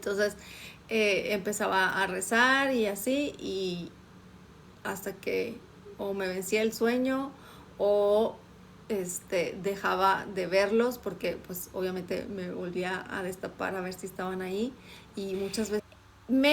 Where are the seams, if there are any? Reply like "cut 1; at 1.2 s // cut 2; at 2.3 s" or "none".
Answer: cut 1; at 15.5 s